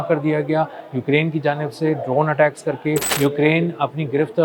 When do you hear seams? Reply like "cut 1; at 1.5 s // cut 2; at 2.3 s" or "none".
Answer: cut 1; at 3.1 s